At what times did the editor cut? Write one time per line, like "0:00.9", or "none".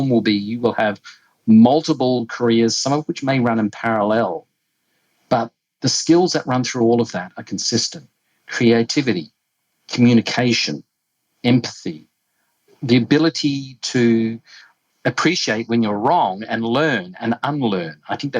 0:05.6